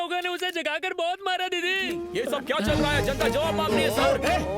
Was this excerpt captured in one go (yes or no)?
no